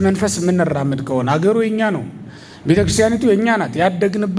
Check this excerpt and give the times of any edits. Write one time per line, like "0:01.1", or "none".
none

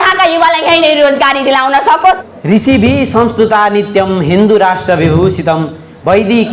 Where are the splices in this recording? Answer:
0:02.3

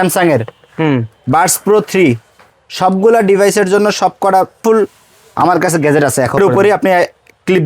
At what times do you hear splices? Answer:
0:04.6
0:06.4

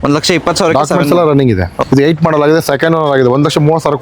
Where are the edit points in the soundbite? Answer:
0:01.8

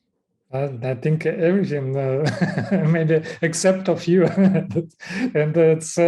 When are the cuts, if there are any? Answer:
none

